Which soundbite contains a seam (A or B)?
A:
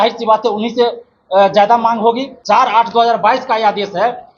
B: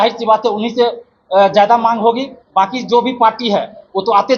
A